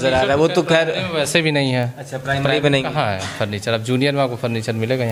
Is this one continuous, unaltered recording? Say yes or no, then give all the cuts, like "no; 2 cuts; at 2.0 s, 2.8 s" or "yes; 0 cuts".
yes; 0 cuts